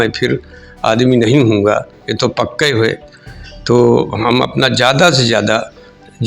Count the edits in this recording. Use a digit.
0